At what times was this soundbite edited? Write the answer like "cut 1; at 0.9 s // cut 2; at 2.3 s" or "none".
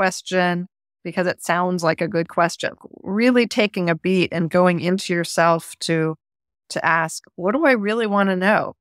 cut 1; at 2.9 s

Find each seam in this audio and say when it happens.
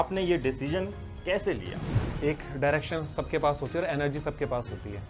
cut 1; at 2.0 s

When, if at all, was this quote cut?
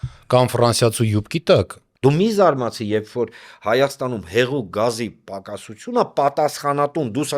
cut 1; at 1.8 s

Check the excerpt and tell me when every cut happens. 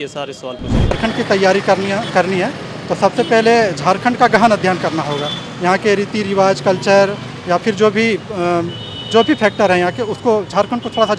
cut 1; at 0.9 s

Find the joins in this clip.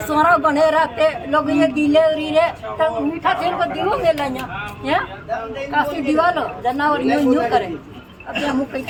none

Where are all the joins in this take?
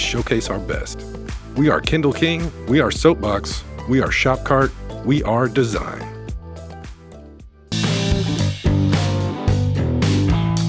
cut 1; at 7.7 s

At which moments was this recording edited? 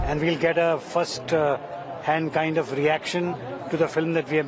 none

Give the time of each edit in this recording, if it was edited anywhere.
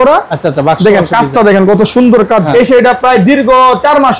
cut 1; at 2.5 s

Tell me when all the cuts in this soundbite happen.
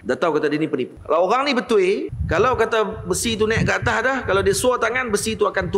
cut 1; at 1.0 s // cut 2; at 2.2 s

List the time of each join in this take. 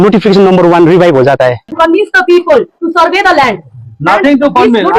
cut 1; at 1.7 s

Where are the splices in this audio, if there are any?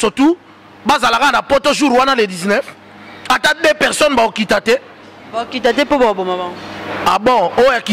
none

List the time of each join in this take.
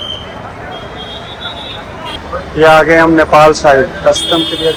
none

